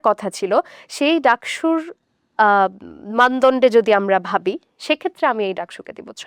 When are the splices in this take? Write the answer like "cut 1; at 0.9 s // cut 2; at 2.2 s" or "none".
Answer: none